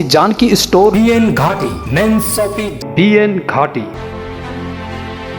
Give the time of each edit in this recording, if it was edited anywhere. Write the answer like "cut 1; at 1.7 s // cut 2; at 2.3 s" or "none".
cut 1; at 2.8 s // cut 2; at 3.9 s